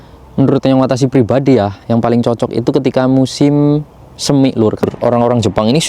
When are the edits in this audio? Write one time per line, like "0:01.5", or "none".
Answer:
0:04.8